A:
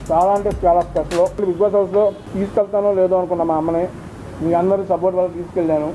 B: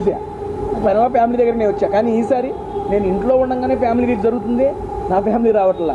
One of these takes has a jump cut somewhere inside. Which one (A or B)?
A